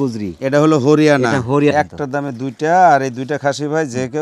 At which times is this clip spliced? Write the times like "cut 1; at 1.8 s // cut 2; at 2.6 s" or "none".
cut 1; at 1.7 s

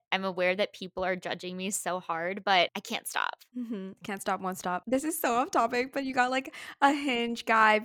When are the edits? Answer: cut 1; at 4.8 s

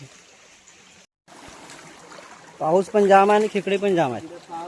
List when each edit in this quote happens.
cut 1; at 1.1 s

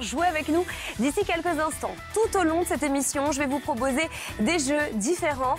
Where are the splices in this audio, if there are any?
none

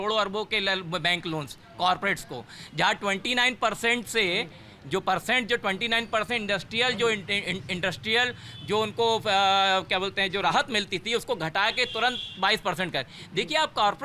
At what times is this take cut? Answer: none

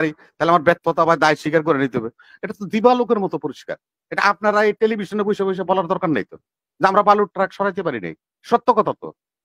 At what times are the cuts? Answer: none

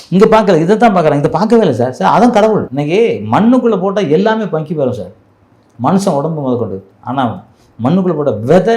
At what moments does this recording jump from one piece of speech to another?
cut 1; at 2.7 s

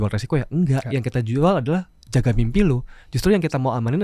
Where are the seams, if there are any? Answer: none

